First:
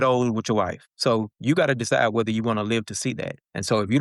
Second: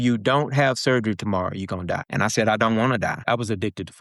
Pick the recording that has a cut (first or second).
second